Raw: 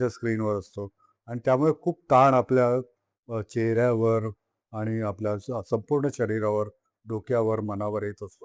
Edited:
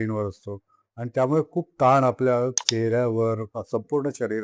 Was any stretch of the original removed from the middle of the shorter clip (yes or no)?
yes